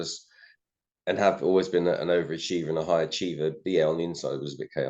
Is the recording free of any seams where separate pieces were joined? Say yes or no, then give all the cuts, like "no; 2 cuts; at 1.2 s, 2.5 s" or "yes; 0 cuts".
yes; 0 cuts